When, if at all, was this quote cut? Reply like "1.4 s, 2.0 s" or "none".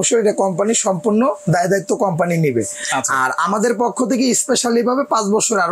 none